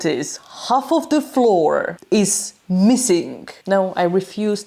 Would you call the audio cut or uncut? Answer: cut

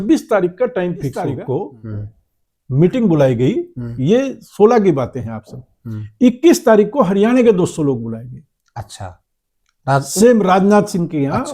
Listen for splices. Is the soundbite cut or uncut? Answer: cut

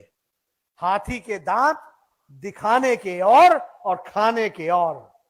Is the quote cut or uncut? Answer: uncut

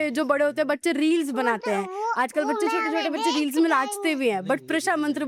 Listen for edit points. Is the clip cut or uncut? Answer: uncut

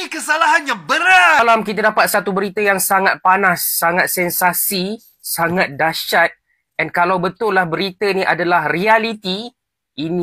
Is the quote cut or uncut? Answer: cut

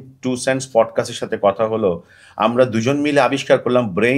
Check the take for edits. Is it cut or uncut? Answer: uncut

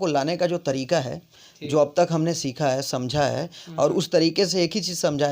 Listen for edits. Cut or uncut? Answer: uncut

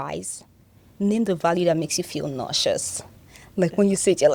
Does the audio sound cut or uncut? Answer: uncut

